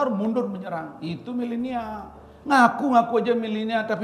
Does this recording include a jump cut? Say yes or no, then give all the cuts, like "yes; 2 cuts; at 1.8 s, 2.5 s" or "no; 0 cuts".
no; 0 cuts